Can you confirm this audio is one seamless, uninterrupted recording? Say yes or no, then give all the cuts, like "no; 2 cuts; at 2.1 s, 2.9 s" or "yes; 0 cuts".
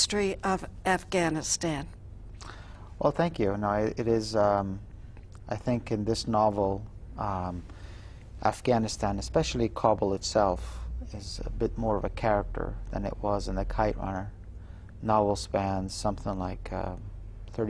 no; 1 cut; at 12.5 s